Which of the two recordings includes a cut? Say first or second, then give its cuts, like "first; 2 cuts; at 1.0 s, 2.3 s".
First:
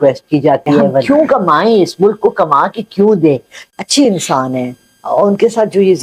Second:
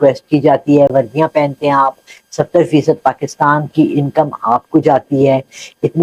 first; 2 cuts; at 1.0 s, 3.6 s